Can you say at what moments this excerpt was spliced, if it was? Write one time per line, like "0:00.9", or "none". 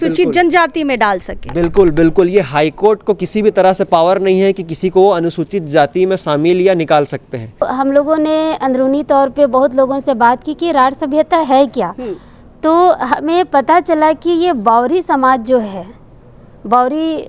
0:07.6